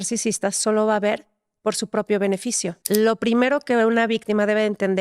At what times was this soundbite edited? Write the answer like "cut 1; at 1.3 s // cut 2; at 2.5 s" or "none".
cut 1; at 2.8 s